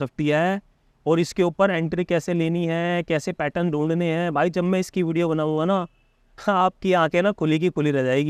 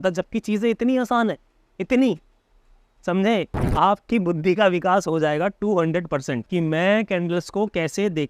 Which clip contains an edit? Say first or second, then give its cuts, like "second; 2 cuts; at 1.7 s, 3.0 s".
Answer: second; 2 cuts; at 3.6 s, 6.4 s